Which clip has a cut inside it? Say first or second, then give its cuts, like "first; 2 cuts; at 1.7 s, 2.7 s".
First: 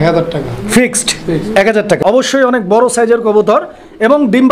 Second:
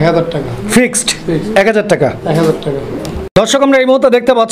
first; 1 cut; at 2.1 s